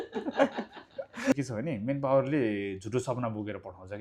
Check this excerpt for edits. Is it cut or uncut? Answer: cut